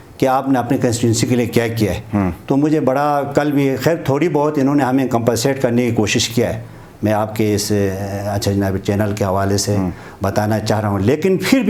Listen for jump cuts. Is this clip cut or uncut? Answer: uncut